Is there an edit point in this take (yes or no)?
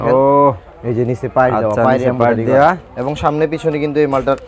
no